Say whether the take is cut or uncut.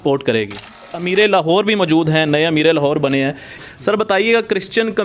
cut